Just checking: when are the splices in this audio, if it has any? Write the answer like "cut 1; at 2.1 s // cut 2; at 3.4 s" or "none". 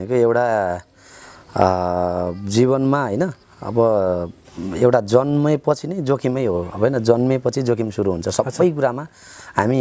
none